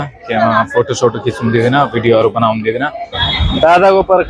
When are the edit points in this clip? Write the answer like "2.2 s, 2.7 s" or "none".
3.4 s